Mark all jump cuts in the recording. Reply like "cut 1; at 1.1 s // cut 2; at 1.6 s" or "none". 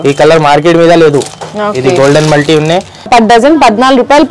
cut 1; at 3.1 s